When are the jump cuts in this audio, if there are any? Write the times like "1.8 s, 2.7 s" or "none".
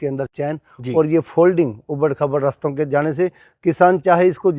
none

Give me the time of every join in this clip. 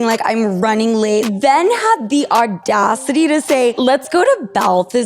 1.3 s, 3.8 s

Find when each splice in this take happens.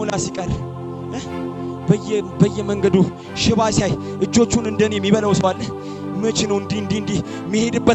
none

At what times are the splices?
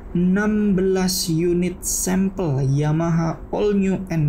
none

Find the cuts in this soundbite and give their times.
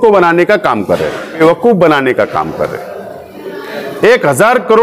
1.4 s

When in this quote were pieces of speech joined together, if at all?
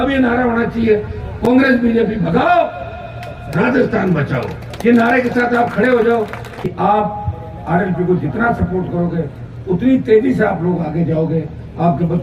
6.6 s

